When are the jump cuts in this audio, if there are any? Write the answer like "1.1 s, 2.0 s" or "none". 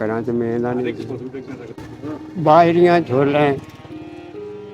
1.8 s

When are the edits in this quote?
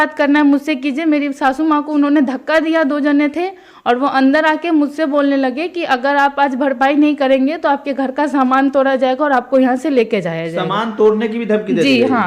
none

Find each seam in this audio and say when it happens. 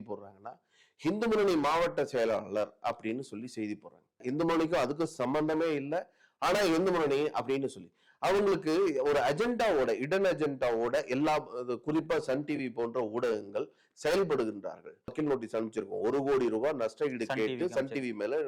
4.2 s, 15.1 s

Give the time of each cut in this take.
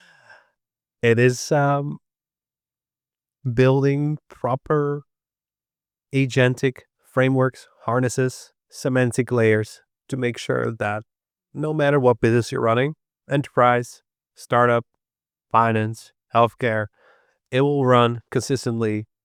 none

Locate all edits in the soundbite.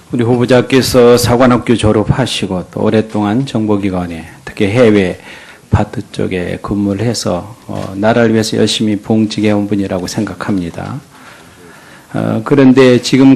none

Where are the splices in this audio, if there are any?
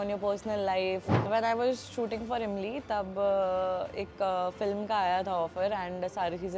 1.3 s

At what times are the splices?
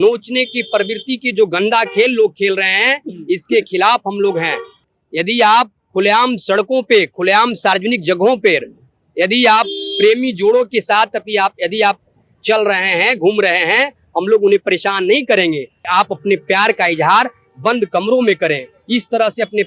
4.8 s, 15.8 s

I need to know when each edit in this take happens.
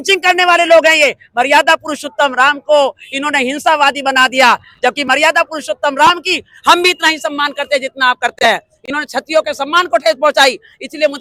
none

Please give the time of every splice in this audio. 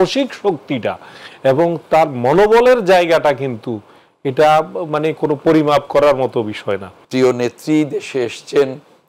7.0 s

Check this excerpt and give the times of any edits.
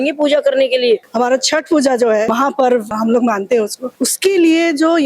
1.1 s, 2.7 s, 3.8 s

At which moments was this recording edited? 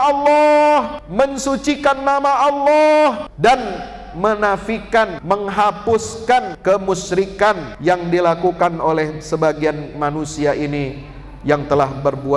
1.0 s, 3.3 s, 5.2 s, 6.5 s, 7.7 s

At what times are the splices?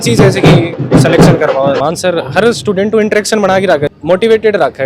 1.8 s, 3.9 s

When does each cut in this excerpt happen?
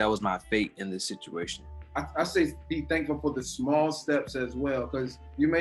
2.0 s

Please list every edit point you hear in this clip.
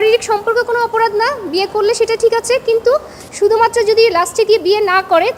none

